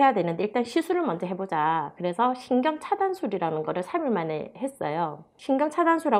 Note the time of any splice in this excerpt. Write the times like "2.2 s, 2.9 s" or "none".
none